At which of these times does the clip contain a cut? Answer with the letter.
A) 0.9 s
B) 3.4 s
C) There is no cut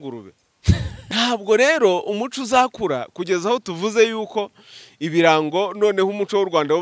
A